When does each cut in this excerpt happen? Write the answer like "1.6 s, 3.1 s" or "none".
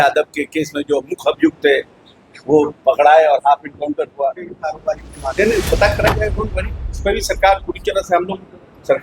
4.7 s

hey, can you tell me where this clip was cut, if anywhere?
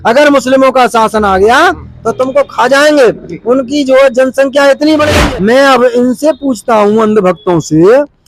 5.1 s

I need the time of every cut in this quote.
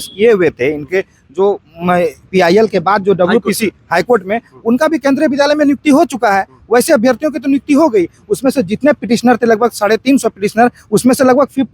none

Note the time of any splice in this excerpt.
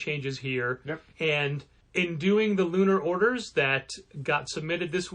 1.1 s

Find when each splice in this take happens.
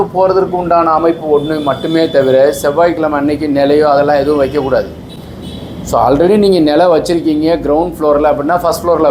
none

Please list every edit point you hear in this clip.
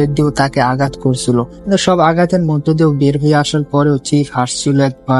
none

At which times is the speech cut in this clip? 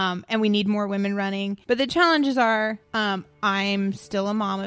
1.6 s, 2.8 s

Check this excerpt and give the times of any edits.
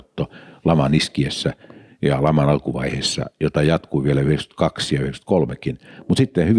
none

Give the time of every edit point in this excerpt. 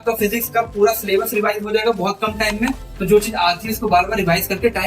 2.9 s

